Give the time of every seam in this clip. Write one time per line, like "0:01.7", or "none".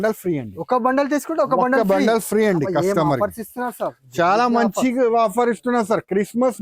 none